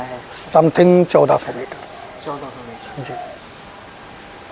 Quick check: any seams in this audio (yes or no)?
no